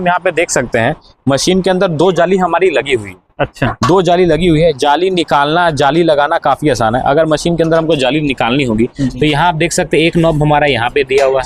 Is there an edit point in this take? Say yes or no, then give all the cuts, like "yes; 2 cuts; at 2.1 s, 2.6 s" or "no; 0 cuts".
no; 0 cuts